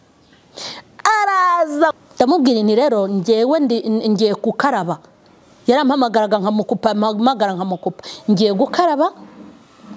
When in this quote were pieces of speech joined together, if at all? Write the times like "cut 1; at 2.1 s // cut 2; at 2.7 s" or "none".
cut 1; at 1.9 s